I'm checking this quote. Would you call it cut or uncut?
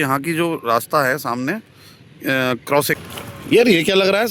cut